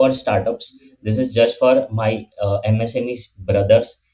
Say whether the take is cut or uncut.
uncut